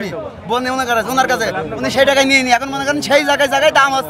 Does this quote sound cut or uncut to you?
uncut